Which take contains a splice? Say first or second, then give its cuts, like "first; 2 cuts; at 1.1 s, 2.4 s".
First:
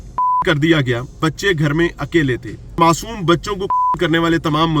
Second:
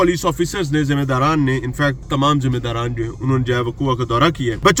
first; 2 cuts; at 1.2 s, 2.8 s